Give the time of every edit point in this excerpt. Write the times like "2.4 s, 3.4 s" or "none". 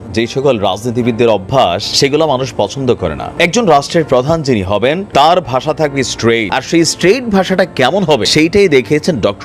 1.9 s, 3.2 s, 5.0 s, 6.5 s, 8.3 s